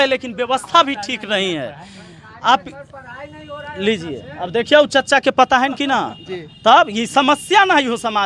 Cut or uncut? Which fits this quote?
uncut